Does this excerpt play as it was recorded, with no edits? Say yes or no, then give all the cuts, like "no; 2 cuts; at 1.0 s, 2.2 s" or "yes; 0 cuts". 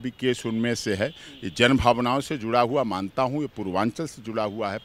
yes; 0 cuts